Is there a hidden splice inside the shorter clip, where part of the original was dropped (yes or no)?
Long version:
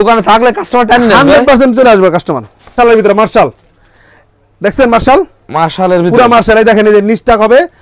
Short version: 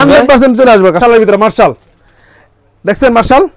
yes